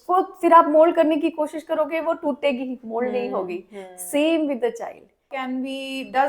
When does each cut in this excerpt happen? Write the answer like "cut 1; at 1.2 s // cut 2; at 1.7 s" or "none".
cut 1; at 5.3 s